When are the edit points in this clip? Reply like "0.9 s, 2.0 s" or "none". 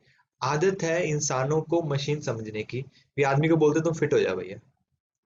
none